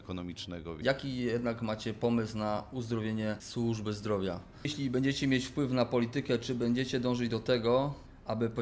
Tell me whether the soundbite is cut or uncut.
cut